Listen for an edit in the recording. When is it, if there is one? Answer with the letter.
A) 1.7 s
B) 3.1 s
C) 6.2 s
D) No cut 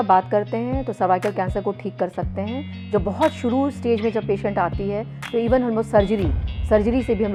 D